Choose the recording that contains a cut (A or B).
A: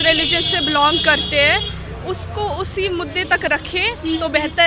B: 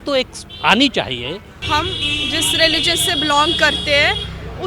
B